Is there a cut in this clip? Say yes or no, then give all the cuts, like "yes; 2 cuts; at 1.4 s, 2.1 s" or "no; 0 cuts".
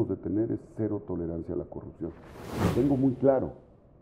yes; 1 cut; at 2.6 s